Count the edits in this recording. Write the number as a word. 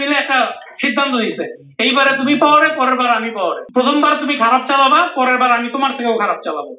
one